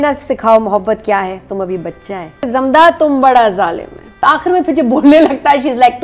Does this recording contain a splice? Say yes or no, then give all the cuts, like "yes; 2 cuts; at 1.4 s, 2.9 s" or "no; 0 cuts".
yes; 2 cuts; at 2.5 s, 4.2 s